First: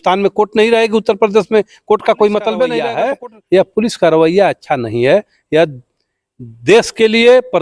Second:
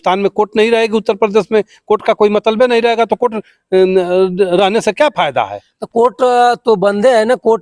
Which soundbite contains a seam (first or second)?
first